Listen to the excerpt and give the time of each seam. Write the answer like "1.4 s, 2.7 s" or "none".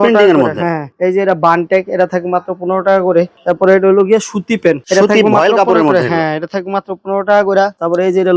none